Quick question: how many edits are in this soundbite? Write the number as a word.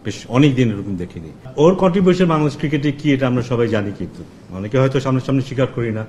one